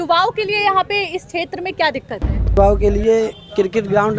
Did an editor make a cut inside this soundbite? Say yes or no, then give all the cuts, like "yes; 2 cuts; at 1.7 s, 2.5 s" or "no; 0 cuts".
yes; 1 cut; at 2.6 s